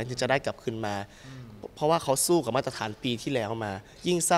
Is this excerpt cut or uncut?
uncut